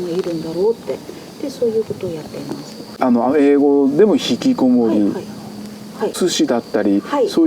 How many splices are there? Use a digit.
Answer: 1